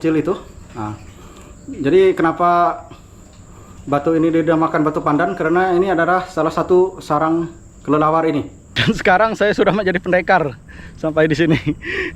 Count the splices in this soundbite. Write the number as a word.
one